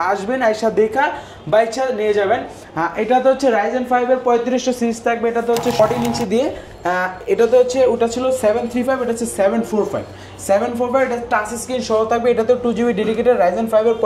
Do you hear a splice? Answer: yes; 1 cut; at 5.8 s

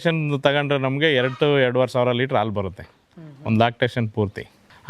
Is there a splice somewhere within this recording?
no; 0 cuts

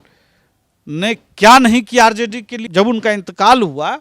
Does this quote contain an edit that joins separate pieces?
yes; 1 cut; at 2.6 s

